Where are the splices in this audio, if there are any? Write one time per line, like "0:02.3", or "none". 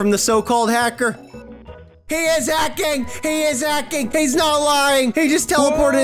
none